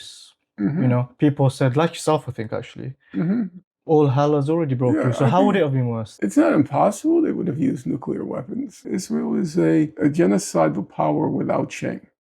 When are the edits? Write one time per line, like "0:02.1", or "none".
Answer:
0:06.0
0:08.8
0:09.9